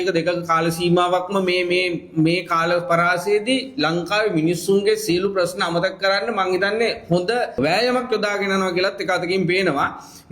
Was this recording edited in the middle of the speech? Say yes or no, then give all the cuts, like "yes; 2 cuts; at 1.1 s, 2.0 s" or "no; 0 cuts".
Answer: yes; 1 cut; at 7.5 s